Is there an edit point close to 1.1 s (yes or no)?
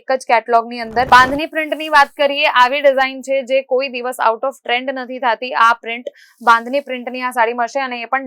yes